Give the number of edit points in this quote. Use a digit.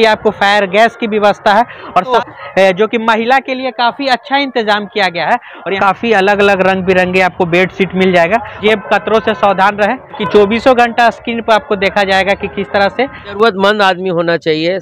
5